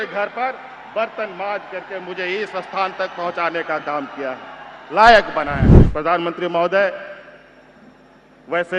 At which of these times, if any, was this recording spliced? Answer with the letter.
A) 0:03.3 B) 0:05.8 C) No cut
B